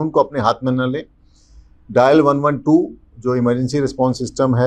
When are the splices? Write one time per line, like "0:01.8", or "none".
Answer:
none